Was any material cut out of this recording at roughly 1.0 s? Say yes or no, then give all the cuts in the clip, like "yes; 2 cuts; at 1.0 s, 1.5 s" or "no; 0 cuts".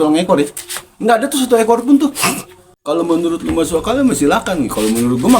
no; 1 cut; at 2.8 s